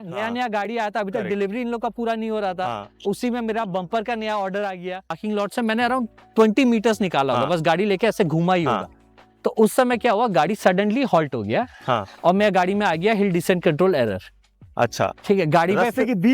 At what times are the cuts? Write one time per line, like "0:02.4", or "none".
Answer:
0:05.2